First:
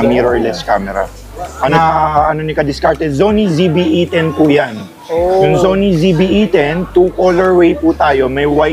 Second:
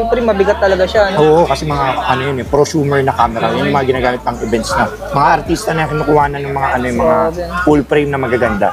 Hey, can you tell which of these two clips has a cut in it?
first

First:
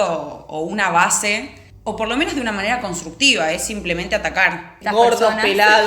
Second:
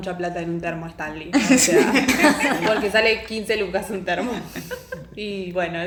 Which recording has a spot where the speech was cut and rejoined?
first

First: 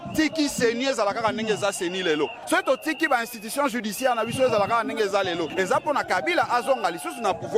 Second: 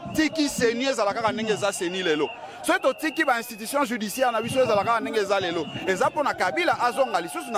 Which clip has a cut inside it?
first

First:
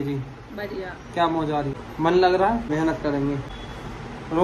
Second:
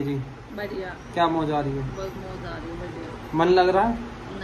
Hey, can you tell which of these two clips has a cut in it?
first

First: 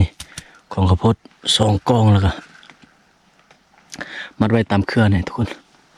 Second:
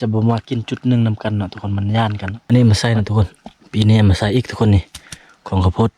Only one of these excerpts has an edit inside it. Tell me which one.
second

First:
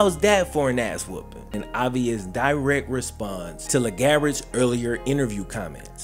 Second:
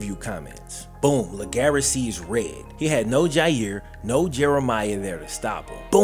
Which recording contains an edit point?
first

